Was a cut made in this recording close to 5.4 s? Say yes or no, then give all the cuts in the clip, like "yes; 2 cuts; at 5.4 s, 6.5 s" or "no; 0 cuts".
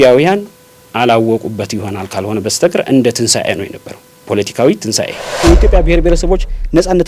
yes; 1 cut; at 5.4 s